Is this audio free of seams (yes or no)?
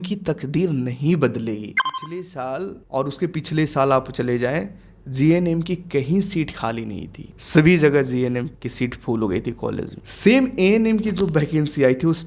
no